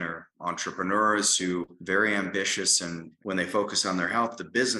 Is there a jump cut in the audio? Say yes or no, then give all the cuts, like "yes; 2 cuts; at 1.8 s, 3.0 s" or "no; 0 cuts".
yes; 2 cuts; at 1.8 s, 3.1 s